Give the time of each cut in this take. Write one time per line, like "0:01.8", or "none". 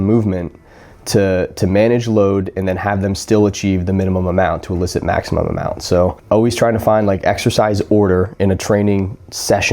0:06.2